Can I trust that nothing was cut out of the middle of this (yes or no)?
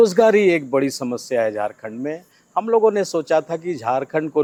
yes